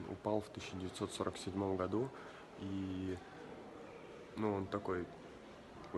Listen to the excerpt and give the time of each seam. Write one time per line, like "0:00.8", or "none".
none